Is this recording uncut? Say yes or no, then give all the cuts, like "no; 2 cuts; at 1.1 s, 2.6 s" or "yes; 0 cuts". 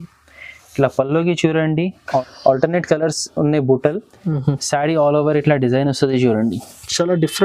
no; 1 cut; at 2.2 s